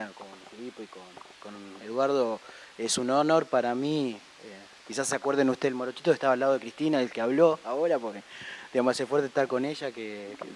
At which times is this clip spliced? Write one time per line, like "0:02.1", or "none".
0:05.7